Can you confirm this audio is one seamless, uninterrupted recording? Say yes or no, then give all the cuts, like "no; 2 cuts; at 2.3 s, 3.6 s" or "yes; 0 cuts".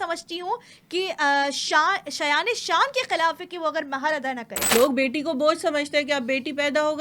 no; 1 cut; at 4.6 s